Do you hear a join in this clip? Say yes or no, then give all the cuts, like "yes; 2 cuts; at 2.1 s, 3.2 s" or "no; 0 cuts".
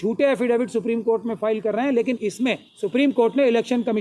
yes; 1 cut; at 2.7 s